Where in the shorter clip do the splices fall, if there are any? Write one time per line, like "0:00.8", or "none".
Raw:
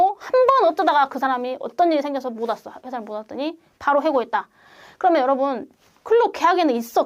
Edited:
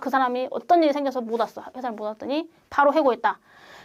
none